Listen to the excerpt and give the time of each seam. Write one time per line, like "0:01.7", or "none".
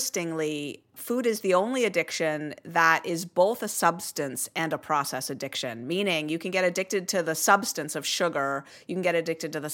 0:00.9